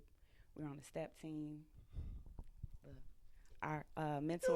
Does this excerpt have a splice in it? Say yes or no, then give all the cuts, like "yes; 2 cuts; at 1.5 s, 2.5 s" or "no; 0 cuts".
no; 0 cuts